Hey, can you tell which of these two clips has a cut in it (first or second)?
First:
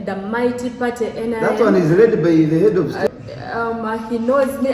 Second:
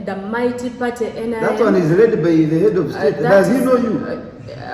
first